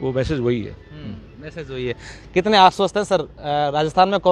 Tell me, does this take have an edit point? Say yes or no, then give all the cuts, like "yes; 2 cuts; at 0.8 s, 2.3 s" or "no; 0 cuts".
no; 0 cuts